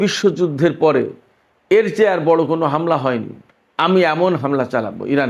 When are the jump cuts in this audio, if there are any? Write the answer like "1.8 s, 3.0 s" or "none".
none

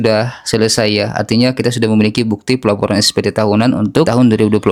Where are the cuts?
none

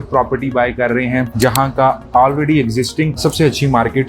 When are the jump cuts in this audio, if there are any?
1.3 s

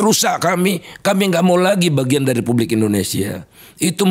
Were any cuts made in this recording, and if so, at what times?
none

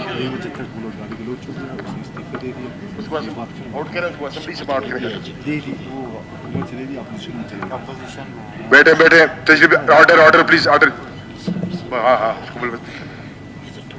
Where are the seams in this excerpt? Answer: none

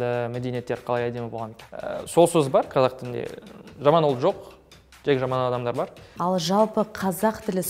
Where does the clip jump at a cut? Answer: 1.5 s, 6.1 s

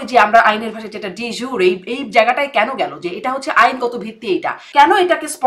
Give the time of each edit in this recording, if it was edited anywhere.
4.6 s

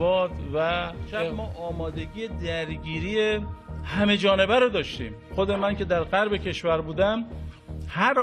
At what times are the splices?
1.3 s

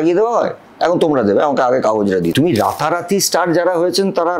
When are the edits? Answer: 2.3 s

